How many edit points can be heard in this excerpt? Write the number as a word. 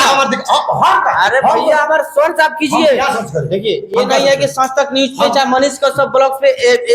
zero